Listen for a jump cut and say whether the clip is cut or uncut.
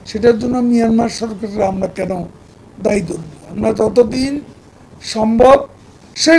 uncut